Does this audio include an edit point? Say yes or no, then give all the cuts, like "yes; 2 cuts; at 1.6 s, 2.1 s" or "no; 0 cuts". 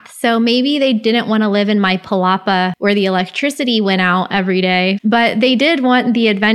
yes; 2 cuts; at 2.7 s, 5.0 s